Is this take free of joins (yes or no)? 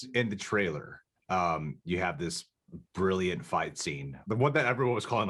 no